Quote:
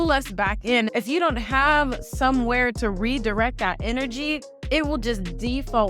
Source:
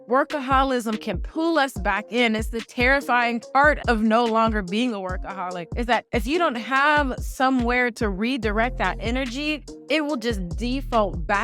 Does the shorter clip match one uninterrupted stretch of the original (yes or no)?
no